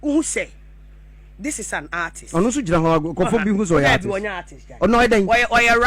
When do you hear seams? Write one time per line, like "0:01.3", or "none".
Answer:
none